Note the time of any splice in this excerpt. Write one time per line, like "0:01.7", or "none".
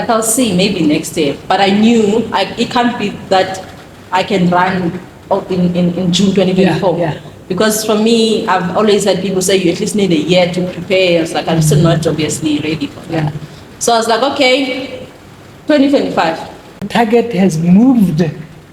0:16.9